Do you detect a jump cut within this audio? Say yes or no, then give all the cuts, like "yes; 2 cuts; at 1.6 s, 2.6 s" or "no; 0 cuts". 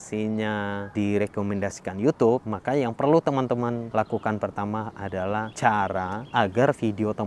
yes; 5 cuts; at 0.9 s, 2.5 s, 3.9 s, 5.3 s, 6.2 s